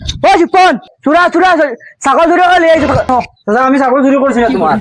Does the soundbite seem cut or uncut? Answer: cut